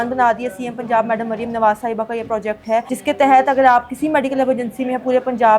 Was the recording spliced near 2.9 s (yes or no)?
yes